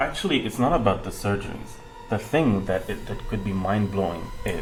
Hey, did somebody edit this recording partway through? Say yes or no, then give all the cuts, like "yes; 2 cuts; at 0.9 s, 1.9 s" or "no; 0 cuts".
no; 0 cuts